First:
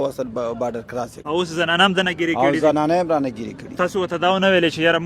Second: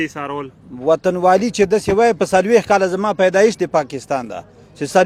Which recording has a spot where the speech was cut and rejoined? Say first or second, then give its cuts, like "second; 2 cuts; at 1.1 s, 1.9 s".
first; 1 cut; at 1.2 s